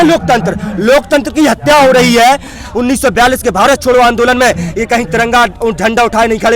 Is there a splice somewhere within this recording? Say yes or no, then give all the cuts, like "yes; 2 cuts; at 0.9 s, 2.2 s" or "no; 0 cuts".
yes; 1 cut; at 2.6 s